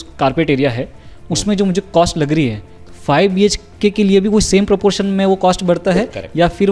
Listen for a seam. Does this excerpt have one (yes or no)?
no